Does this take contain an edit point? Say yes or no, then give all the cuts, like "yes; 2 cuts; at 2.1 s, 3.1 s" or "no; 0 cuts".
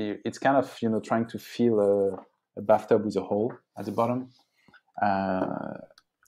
no; 0 cuts